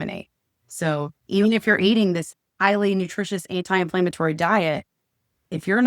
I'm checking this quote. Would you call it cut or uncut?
cut